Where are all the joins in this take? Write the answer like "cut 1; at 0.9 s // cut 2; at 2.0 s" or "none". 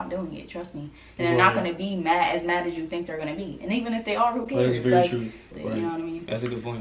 cut 1; at 5.5 s